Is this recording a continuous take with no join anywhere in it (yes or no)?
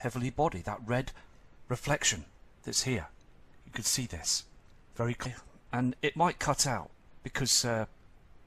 yes